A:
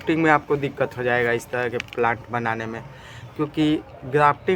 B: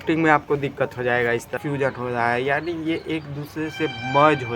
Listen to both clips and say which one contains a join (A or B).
B